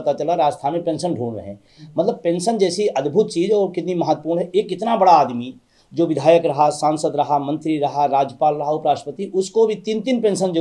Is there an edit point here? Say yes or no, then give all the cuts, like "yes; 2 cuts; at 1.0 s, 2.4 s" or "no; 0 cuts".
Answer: no; 0 cuts